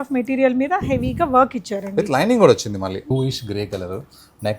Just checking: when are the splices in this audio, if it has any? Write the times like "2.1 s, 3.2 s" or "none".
3.0 s

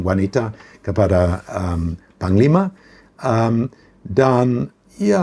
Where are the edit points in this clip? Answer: none

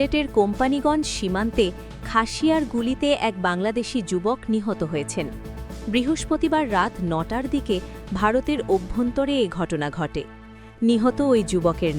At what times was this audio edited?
none

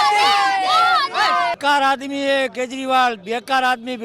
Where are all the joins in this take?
1.6 s

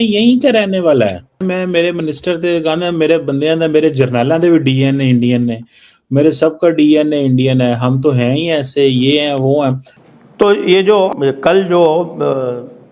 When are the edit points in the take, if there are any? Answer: 1.4 s, 9.9 s, 11.1 s

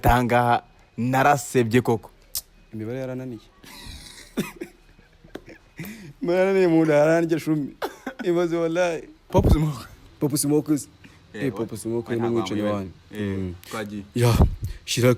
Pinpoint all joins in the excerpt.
9.2 s

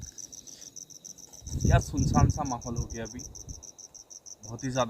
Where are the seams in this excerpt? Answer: 1.7 s

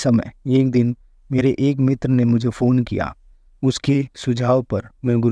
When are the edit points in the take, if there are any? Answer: none

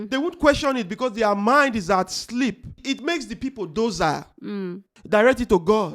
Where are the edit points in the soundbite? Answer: 2.8 s, 4.9 s

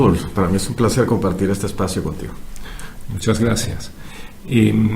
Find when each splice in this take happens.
2.3 s

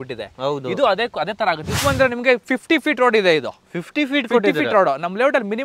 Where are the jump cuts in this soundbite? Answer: 1.8 s

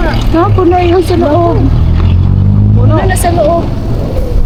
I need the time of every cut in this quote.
none

